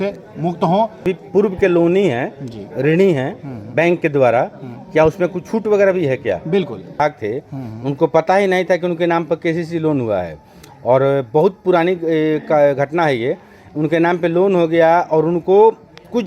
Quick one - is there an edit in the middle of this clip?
yes; 2 cuts; at 1.0 s, 7.0 s

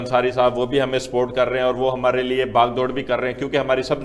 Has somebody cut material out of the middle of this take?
no; 0 cuts

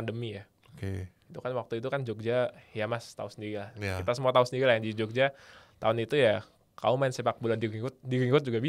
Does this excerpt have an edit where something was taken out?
no; 0 cuts

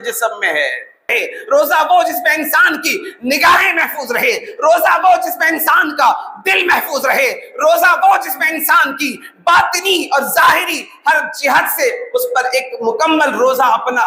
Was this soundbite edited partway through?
yes; 1 cut; at 1.1 s

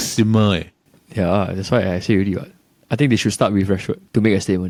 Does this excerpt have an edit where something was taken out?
no; 0 cuts

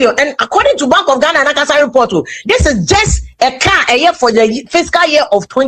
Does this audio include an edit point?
no; 0 cuts

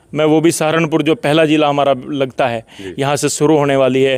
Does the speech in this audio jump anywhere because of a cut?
no; 0 cuts

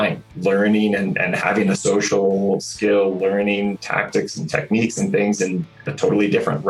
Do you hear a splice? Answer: yes; 1 cut; at 3.8 s

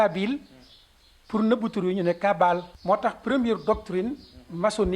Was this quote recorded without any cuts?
no; 1 cut; at 2.7 s

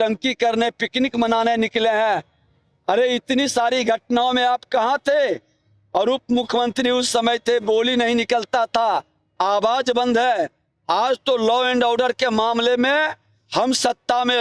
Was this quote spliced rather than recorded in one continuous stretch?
no; 0 cuts

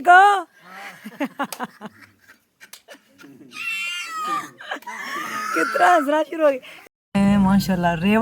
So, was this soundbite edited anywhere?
yes; 1 cut; at 6.7 s

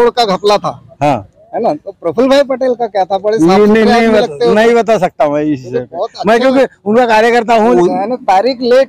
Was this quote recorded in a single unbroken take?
no; 1 cut; at 7.7 s

